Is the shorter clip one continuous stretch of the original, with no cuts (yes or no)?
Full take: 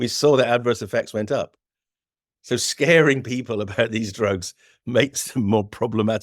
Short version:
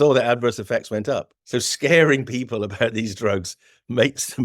no